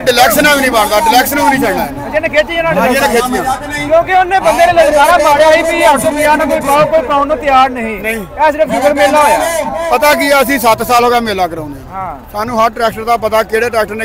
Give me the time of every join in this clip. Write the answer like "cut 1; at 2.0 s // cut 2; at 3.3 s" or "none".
none